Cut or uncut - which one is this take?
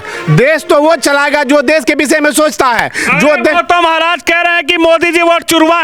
uncut